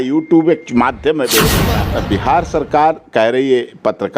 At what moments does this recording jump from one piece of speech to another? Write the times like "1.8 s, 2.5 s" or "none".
1.7 s